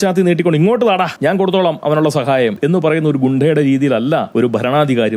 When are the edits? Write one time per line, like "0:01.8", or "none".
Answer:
0:01.1
0:02.6
0:04.3